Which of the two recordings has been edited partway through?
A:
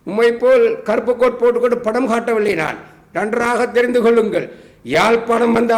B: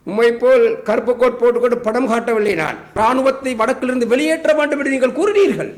B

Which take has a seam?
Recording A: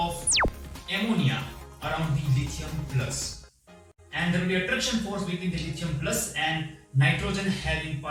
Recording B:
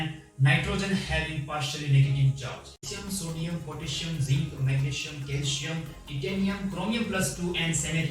B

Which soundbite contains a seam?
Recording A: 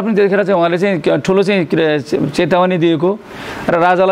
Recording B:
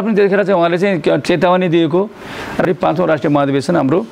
B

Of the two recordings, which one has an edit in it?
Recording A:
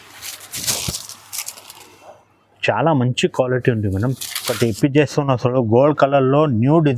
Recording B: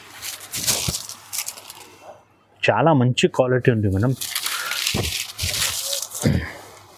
A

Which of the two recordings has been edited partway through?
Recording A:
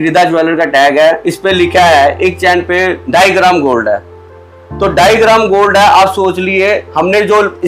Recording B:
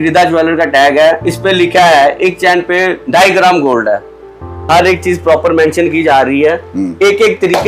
B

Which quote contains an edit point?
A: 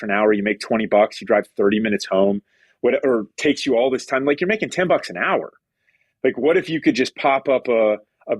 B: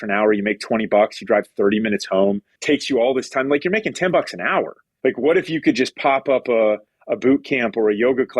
B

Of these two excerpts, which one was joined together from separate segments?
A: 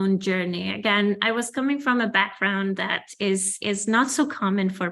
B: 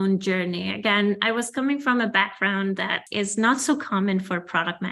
B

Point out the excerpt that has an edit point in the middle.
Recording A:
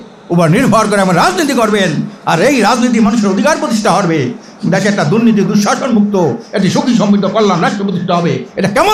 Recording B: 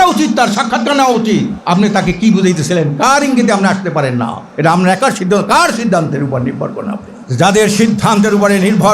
B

